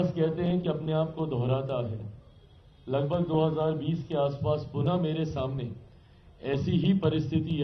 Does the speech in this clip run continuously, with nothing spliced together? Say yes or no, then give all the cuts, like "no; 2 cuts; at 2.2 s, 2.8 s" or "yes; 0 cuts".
yes; 0 cuts